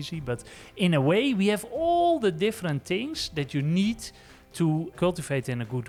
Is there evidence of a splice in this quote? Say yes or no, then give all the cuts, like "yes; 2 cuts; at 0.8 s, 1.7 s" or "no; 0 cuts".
no; 0 cuts